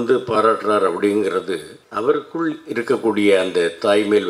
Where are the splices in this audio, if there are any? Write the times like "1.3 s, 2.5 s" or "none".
1.8 s